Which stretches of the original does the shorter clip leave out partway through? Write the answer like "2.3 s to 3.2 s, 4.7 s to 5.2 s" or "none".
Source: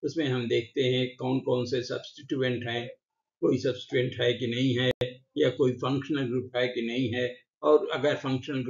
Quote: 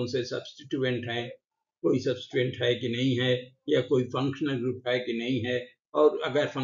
5.0 s to 5.1 s